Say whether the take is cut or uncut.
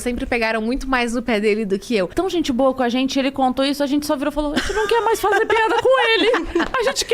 cut